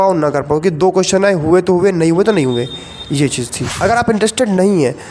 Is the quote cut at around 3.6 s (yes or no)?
yes